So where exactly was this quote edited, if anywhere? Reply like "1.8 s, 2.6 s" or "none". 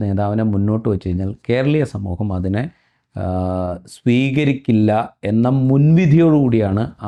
none